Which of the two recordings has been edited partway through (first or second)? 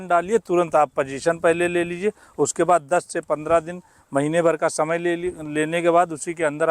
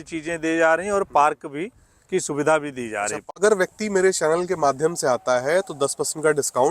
second